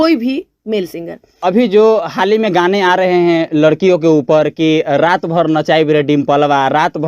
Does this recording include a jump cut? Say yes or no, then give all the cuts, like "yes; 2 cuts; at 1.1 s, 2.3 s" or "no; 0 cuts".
yes; 1 cut; at 1.3 s